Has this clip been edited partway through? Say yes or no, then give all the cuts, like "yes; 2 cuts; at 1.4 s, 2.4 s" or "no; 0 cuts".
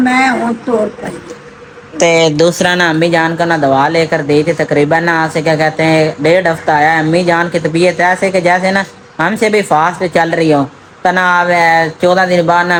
no; 0 cuts